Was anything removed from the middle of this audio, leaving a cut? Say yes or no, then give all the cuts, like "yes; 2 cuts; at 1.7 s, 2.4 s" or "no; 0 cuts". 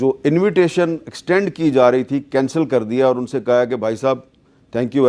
no; 0 cuts